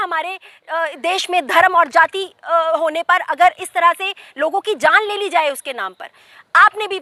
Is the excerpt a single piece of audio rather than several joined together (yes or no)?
yes